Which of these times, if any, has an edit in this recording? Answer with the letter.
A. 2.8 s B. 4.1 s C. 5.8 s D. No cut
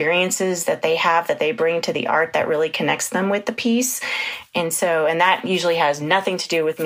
D